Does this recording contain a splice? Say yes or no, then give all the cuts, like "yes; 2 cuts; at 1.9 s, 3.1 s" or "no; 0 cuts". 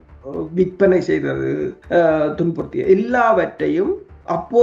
yes; 1 cut; at 1.7 s